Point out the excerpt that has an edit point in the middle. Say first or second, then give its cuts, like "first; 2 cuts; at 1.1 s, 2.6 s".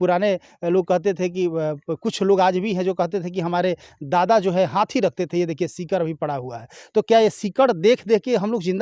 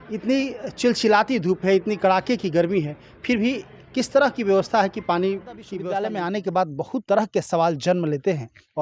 second; 1 cut; at 5.7 s